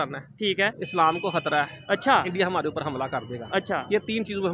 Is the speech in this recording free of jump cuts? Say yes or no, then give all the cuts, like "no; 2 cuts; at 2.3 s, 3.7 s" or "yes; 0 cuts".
yes; 0 cuts